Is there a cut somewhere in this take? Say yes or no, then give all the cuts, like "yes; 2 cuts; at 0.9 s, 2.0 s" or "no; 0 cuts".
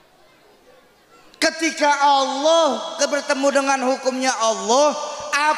no; 0 cuts